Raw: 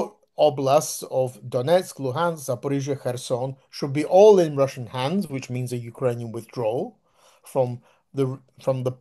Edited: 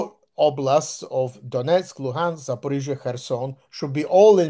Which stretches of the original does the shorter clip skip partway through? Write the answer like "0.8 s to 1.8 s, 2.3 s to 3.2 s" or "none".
none